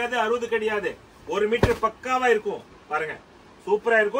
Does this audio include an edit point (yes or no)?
no